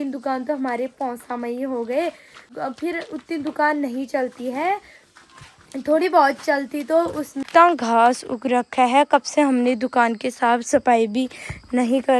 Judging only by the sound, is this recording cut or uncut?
cut